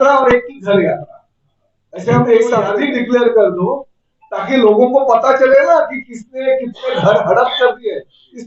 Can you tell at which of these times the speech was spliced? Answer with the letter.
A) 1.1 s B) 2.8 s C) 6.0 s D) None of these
B